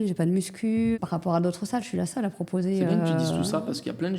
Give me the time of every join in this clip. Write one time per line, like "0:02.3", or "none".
0:01.0

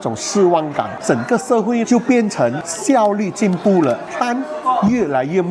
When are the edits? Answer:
0:01.0
0:02.7
0:04.1

